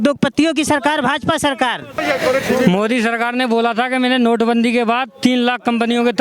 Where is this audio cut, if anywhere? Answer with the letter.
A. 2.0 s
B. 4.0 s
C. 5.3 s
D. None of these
A